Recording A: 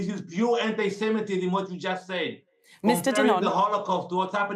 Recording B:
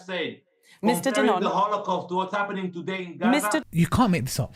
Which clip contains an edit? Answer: B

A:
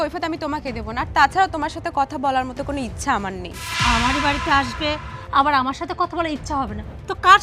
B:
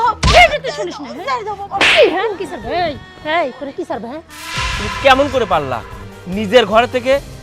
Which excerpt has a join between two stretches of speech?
B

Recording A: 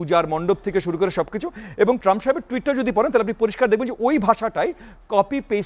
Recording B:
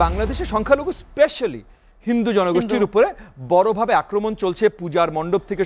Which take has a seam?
A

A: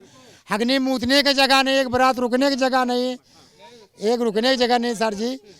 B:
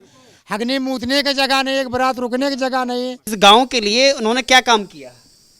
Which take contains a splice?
B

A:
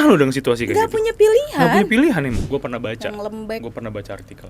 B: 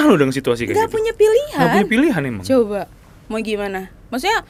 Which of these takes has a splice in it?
A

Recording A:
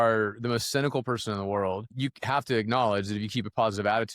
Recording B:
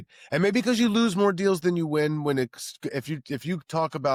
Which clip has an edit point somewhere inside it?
A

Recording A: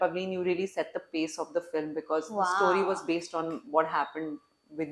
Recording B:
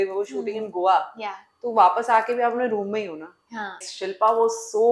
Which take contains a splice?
B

